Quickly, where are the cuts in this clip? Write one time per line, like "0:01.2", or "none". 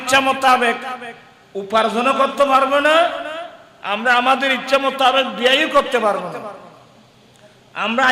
none